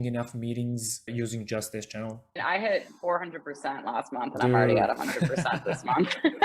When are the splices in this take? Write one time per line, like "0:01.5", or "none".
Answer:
0:01.1
0:02.4